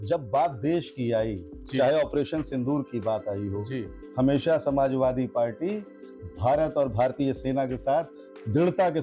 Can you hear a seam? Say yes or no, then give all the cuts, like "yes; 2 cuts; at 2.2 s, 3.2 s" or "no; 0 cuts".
no; 0 cuts